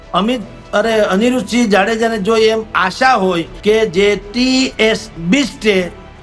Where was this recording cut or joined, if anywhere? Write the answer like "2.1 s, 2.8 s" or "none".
3.5 s